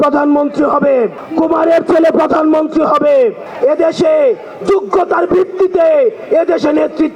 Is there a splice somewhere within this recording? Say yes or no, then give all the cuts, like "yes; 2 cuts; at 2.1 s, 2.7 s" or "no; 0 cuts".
yes; 2 cuts; at 1.2 s, 3.4 s